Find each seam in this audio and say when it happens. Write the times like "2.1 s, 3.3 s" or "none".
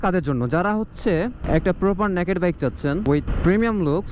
3.2 s